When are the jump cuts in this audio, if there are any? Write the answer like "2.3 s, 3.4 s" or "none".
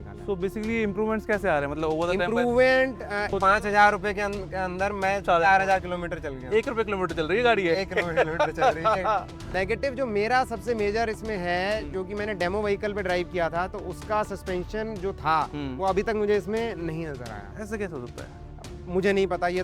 3.3 s, 9.4 s

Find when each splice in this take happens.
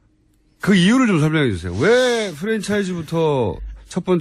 none

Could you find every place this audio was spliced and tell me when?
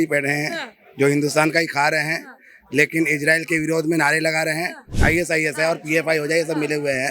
4.9 s

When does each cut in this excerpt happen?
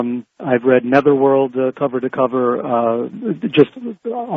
1.1 s

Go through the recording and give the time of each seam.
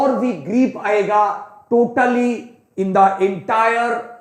none

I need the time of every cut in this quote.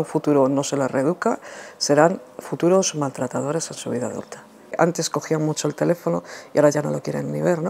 4.7 s

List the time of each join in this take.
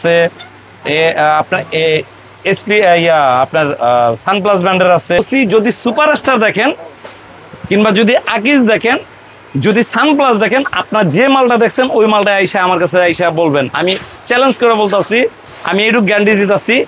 5.2 s

